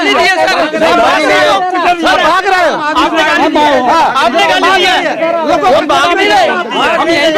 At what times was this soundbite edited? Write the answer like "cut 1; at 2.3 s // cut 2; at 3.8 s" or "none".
none